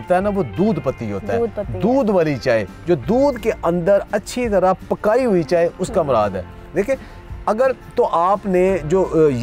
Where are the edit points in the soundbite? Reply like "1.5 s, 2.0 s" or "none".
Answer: none